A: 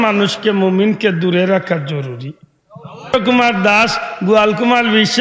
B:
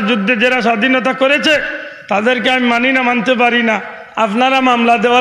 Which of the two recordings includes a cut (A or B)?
A